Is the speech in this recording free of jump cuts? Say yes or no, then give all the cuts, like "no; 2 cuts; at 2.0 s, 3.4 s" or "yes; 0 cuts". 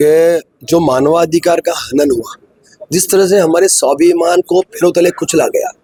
yes; 0 cuts